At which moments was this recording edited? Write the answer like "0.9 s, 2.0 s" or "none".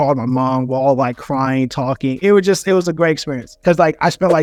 none